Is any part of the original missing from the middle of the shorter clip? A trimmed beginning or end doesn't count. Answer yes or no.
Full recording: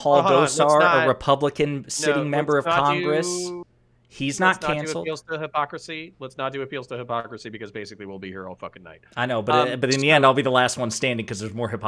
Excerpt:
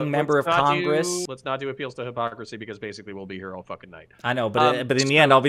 yes